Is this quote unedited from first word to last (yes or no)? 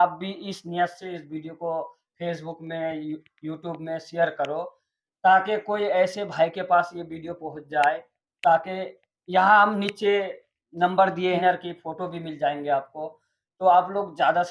no